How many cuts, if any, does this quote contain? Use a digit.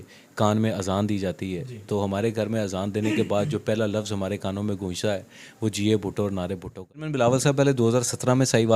1